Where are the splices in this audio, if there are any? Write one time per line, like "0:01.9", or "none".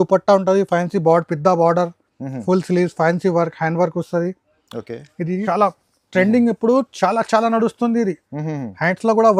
0:05.4

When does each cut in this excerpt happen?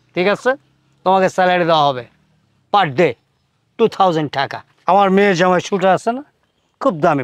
0:04.7

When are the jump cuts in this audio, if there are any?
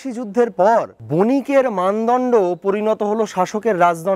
0:01.0

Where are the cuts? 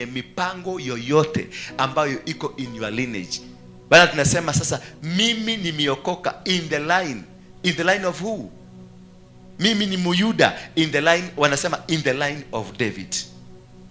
none

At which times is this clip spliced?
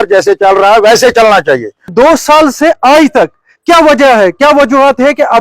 0:01.9

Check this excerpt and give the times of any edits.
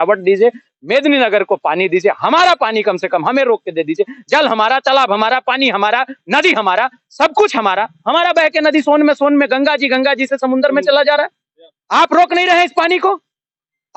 none

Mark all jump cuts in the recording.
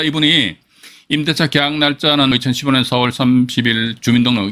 0:02.3

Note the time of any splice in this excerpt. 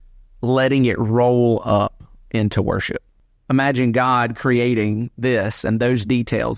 0:03.2

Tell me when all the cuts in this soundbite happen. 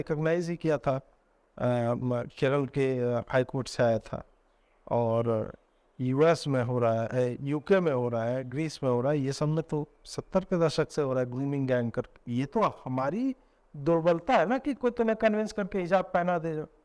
0:12.2

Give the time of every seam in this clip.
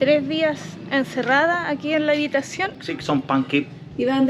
0:02.8

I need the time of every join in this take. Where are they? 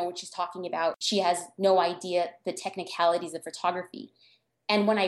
0:01.0

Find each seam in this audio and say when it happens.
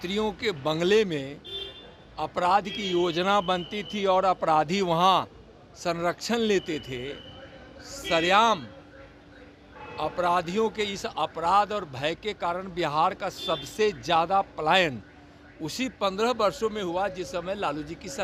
none

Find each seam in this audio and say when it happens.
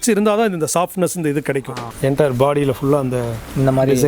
0:01.8

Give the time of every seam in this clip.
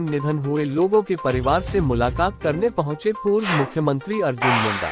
none

